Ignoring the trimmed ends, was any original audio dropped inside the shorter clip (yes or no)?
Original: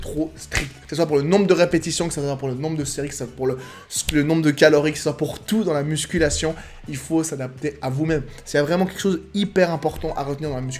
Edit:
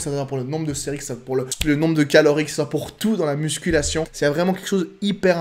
yes